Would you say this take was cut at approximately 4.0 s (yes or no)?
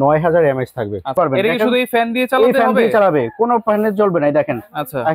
no